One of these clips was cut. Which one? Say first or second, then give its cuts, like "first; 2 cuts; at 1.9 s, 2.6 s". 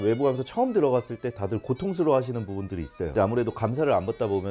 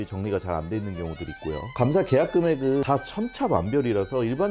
second; 2 cuts; at 1.8 s, 2.8 s